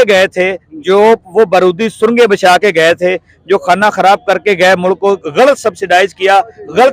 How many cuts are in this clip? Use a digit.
0